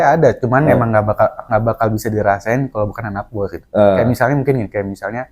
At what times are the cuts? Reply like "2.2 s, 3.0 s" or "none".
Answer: none